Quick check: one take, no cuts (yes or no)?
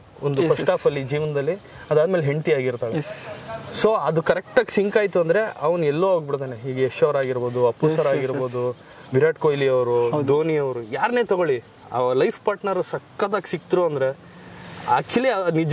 yes